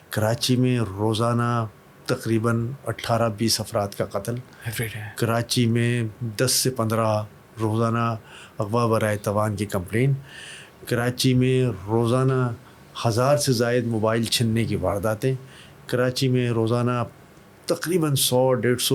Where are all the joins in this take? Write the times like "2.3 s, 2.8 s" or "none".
none

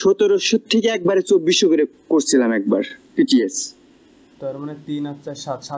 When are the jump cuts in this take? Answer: none

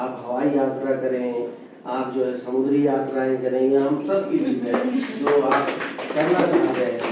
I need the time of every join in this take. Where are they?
none

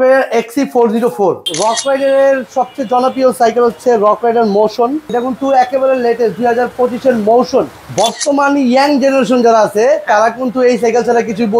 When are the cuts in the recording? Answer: 1.5 s, 5.1 s, 7.8 s

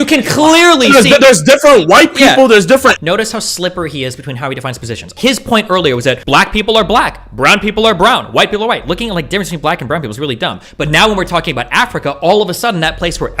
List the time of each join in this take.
3.0 s, 5.2 s, 6.2 s

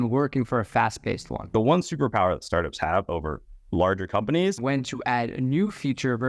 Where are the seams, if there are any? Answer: 1.5 s, 4.6 s

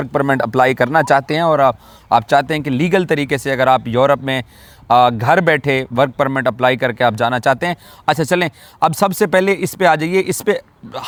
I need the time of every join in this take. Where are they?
none

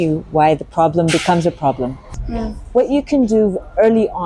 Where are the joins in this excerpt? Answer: 2.2 s

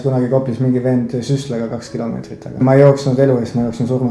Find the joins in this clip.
2.6 s

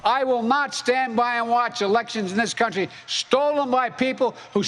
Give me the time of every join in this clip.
none

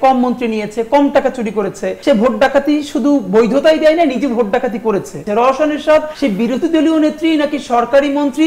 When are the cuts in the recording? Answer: 2.0 s, 5.2 s

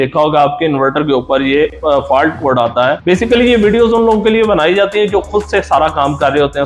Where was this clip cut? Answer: none

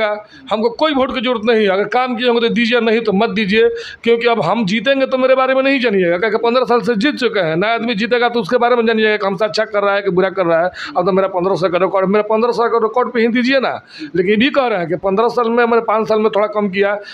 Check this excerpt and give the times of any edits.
none

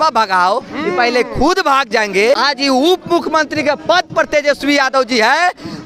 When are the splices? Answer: 2.4 s

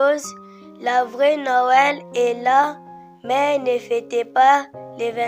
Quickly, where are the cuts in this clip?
none

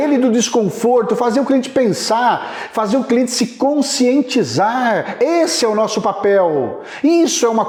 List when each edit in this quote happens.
none

